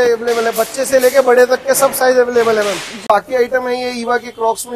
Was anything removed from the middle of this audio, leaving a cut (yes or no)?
yes